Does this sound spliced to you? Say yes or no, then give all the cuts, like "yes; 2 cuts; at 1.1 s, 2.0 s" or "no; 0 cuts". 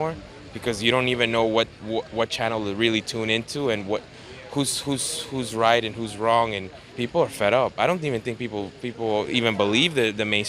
yes; 1 cut; at 6.9 s